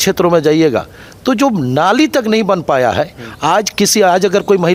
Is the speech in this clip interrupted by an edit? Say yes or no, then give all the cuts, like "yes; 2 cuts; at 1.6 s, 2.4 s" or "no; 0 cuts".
no; 0 cuts